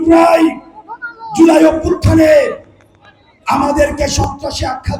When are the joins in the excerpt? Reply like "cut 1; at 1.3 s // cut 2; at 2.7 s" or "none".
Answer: none